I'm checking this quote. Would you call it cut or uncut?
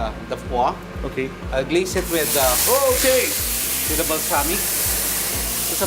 uncut